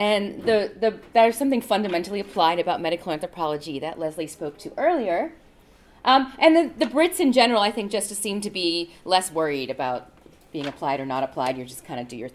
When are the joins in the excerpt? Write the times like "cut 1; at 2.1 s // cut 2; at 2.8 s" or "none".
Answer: cut 1; at 5.4 s